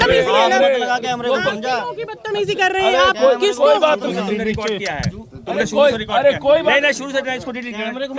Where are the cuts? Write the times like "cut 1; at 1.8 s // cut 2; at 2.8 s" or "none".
none

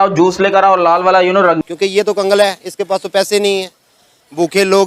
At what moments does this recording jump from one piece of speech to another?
cut 1; at 1.6 s

